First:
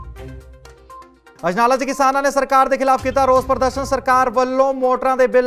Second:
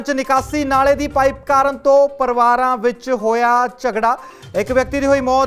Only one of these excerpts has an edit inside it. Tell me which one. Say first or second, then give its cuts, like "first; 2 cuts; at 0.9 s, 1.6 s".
first; 1 cut; at 1.2 s